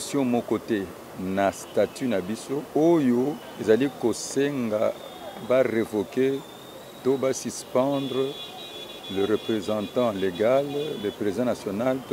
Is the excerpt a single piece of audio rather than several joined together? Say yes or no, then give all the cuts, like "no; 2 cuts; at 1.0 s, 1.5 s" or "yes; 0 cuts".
no; 2 cuts; at 2.7 s, 3.5 s